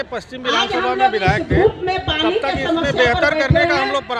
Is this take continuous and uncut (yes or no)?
yes